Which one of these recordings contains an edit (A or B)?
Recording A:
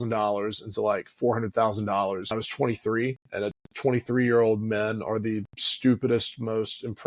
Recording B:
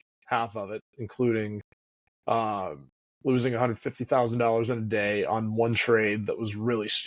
A